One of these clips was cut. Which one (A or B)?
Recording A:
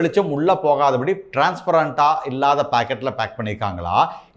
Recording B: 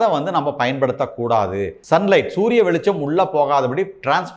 B